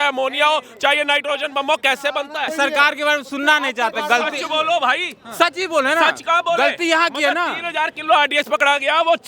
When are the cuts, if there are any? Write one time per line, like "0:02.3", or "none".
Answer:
0:02.5